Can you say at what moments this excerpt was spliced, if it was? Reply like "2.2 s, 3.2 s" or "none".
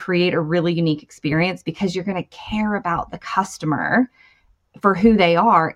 none